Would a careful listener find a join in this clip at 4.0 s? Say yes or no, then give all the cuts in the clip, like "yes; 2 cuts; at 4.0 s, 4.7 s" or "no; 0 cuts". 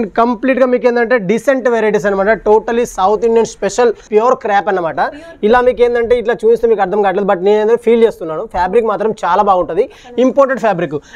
yes; 1 cut; at 4.0 s